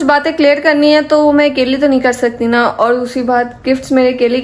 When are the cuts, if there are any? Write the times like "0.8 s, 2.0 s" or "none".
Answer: none